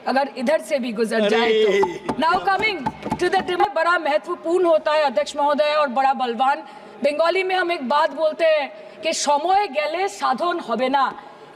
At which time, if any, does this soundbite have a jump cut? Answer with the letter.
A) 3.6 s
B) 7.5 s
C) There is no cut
A